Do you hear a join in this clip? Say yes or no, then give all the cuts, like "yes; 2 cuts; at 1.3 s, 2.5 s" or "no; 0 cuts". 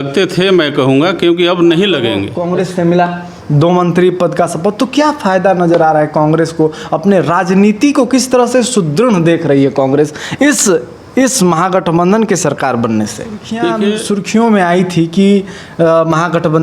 yes; 2 cuts; at 2.3 s, 14.0 s